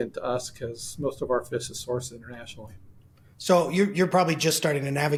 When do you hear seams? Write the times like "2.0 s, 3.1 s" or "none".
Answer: none